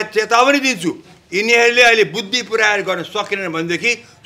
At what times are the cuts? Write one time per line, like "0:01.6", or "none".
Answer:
none